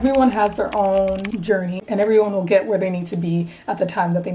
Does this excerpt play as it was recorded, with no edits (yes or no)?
no